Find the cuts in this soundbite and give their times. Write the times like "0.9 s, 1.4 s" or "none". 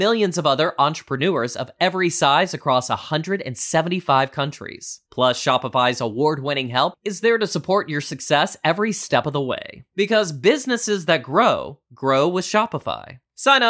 none